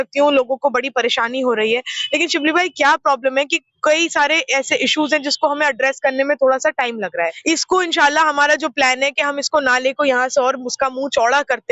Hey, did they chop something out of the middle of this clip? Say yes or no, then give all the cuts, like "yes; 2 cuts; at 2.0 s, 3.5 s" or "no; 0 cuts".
yes; 1 cut; at 7.4 s